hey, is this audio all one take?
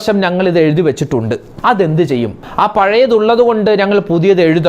no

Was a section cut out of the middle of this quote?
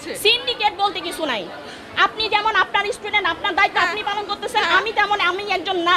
no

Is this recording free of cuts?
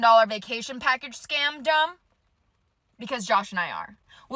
yes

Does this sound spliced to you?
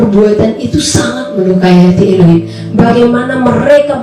no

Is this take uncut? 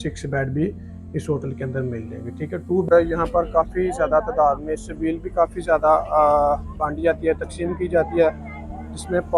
no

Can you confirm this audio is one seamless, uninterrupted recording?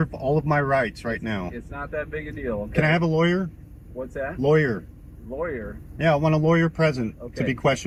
yes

